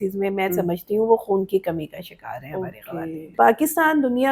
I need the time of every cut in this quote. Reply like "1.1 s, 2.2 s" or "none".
3.3 s